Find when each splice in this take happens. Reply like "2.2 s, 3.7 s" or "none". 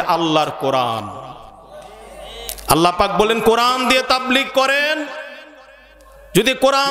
none